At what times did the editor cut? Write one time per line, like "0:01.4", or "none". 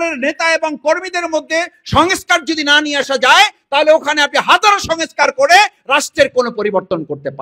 none

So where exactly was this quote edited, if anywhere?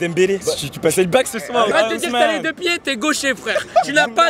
0:01.7

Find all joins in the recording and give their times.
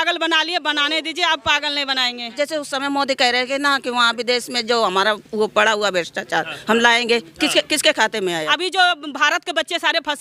0:02.2
0:08.4

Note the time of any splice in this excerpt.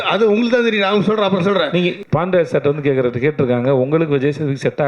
0:02.0

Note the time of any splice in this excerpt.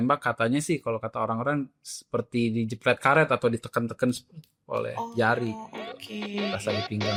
none

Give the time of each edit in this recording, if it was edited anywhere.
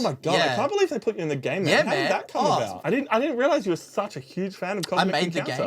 0:02.8

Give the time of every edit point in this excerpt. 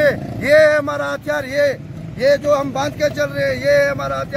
none

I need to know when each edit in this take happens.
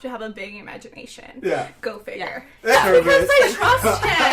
0:02.8

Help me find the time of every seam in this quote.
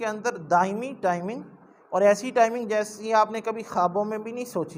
none

